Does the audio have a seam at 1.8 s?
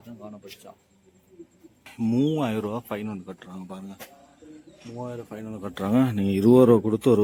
yes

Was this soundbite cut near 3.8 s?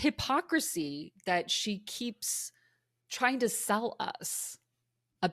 no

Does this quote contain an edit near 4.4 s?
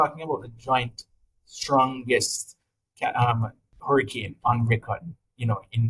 no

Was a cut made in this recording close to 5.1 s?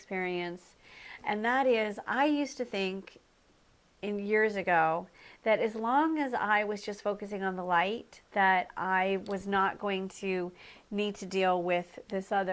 no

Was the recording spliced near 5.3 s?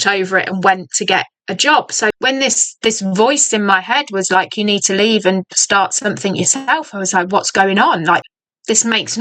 no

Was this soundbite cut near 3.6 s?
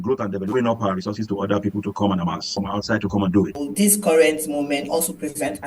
yes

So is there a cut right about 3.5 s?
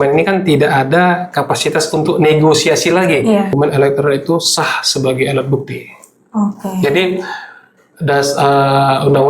yes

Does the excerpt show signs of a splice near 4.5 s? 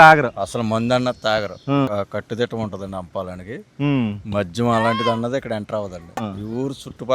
no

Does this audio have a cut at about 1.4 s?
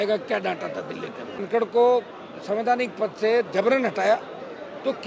yes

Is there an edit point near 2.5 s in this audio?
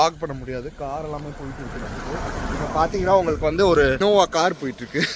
no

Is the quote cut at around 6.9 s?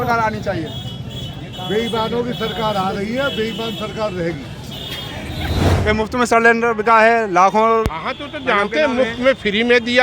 no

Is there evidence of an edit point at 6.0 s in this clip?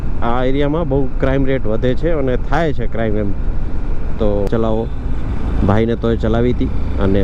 no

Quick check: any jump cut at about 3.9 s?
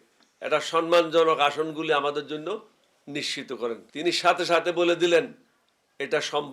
yes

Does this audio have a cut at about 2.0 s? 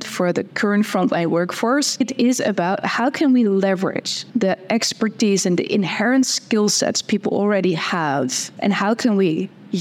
yes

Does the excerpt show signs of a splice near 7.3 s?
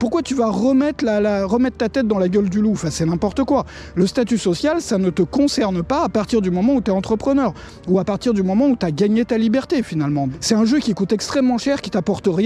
no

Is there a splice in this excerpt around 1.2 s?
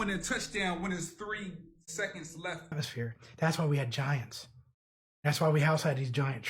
no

